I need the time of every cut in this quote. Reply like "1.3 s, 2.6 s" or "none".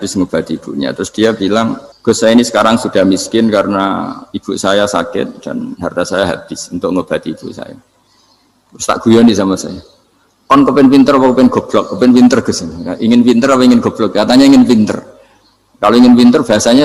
1.9 s